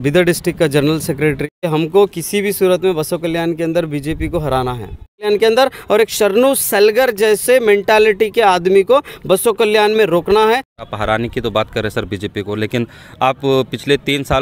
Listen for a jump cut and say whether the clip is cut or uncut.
cut